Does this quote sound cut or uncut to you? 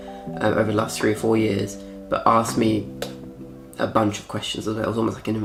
uncut